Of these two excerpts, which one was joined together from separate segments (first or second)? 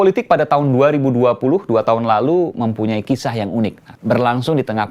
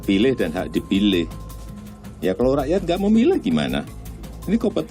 first